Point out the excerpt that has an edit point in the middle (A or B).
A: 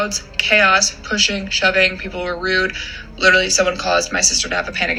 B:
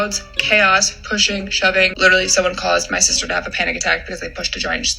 B